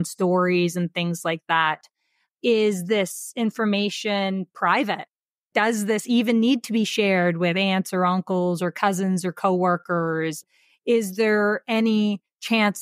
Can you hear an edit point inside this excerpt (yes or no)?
yes